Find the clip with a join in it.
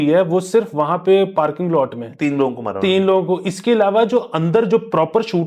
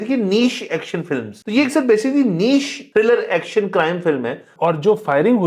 second; 3 cuts; at 1.3 s, 2.8 s, 4.5 s

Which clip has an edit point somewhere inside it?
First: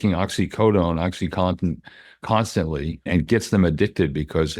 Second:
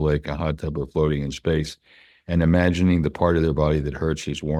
first; 1 cut; at 3.1 s

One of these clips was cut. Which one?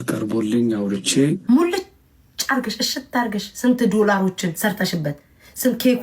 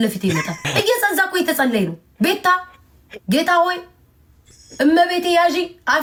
first; 1 cut; at 1.4 s

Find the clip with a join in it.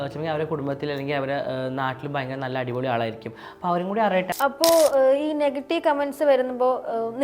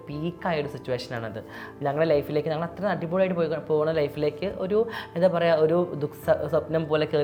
first; 1 cut; at 4.3 s

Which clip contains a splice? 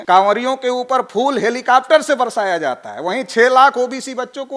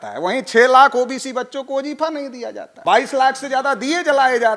second; 1 cut; at 2.7 s

